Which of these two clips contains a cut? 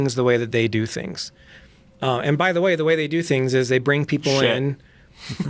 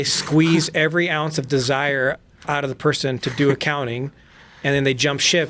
second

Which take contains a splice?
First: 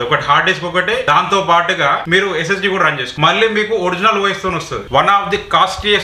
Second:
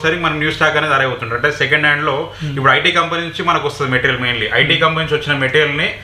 first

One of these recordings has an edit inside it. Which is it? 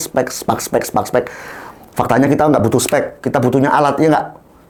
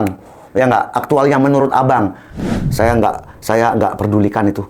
second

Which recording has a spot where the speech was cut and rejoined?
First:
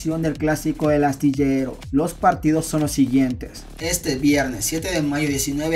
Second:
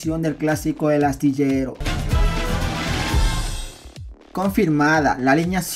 second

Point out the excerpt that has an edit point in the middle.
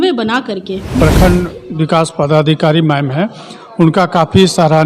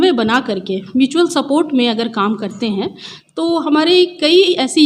first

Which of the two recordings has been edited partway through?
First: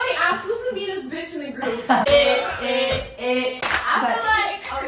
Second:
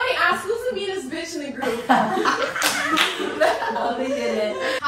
first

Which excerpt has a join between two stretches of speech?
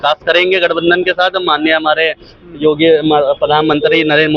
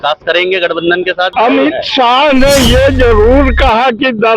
second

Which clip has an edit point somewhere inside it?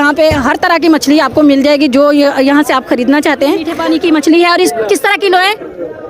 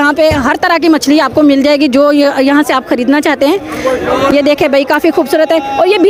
first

